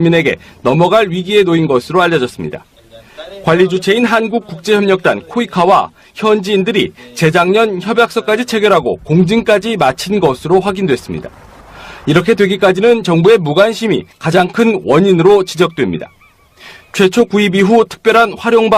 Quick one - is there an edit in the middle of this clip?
no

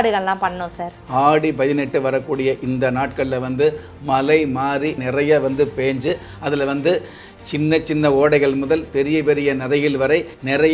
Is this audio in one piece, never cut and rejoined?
no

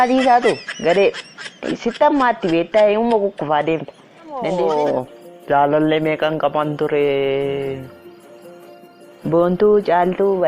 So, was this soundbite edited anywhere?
yes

